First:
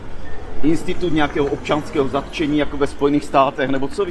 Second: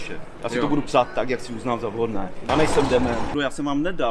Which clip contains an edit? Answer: second; 2 cuts; at 2.5 s, 3.3 s

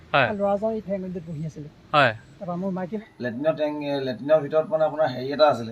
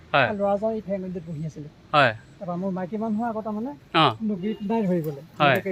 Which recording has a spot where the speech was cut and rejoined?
first; 1 cut; at 3.0 s

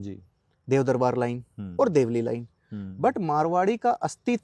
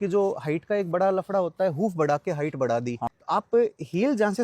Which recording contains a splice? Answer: second; 1 cut; at 3.1 s

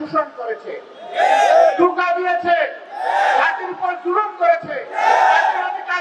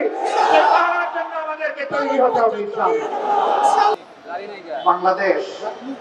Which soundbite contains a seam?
second; 1 cut; at 3.9 s

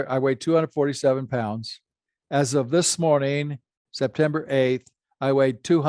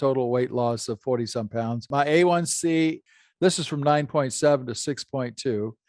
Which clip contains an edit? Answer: second; 2 cuts; at 1.8 s, 3.1 s

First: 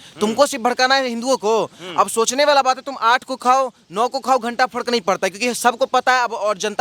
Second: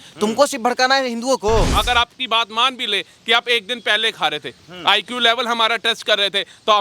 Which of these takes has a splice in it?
second; 1 cut; at 1.7 s

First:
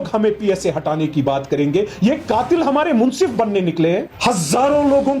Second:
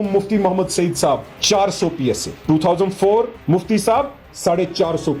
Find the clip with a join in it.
first; 1 cut; at 4.1 s

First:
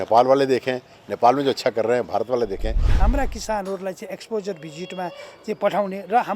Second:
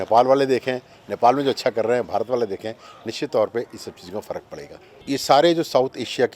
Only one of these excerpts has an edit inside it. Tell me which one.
first; 1 cut; at 2.9 s

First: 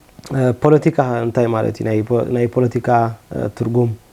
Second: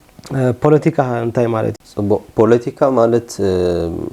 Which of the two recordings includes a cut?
second; 1 cut; at 1.8 s

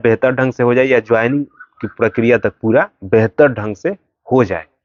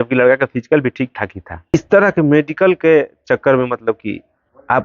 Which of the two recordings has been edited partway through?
second; 1 cut; at 1.7 s

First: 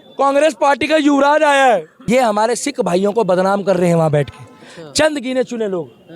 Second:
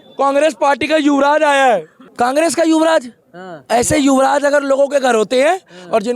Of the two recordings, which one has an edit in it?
first; 1 cut; at 1.9 s

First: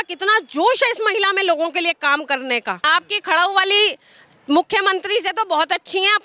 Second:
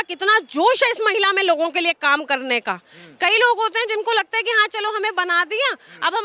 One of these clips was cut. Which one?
first; 1 cut; at 2.8 s

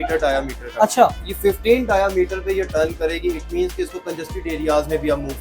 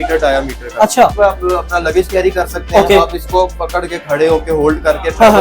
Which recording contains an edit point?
second; 1 cut; at 1.1 s

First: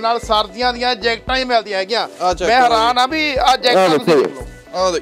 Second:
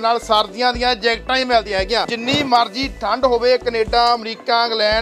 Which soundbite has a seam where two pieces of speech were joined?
second; 1 cut; at 2.1 s

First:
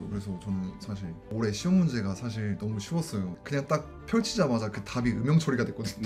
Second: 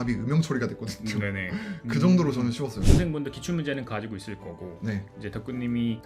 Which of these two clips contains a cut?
second; 1 cut; at 2.8 s

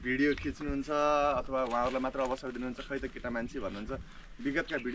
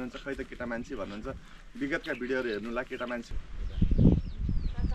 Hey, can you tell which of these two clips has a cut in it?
second; 1 cut; at 3.3 s

